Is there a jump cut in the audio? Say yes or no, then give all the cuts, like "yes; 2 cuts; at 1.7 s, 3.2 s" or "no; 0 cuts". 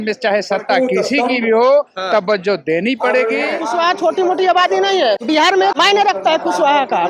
yes; 2 cuts; at 3.6 s, 5.5 s